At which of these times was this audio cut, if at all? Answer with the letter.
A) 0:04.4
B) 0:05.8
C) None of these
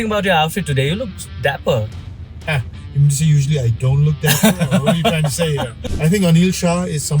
B